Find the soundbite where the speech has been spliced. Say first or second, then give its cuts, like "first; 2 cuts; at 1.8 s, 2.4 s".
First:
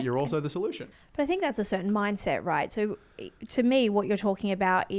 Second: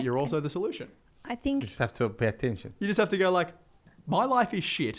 first; 1 cut; at 0.9 s